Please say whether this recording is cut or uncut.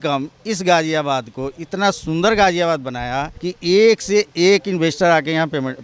uncut